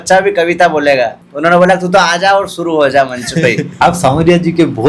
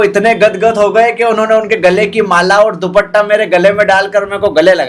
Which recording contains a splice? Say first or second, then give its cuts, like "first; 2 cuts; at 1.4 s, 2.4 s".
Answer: first; 2 cuts; at 1.2 s, 3.7 s